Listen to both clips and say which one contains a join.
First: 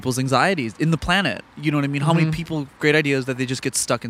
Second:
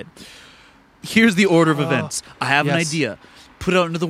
second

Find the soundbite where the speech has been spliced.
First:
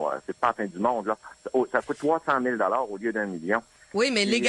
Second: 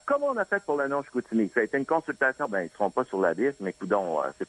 second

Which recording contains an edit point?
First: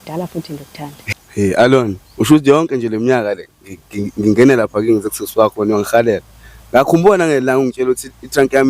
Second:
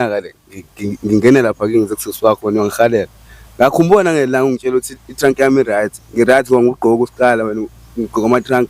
first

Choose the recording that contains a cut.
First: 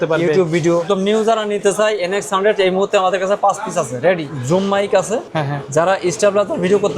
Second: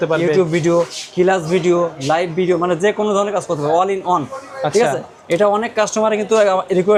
first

